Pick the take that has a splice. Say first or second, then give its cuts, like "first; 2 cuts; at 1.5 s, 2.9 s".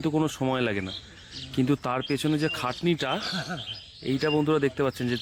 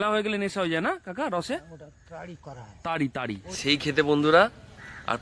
second; 1 cut; at 3.5 s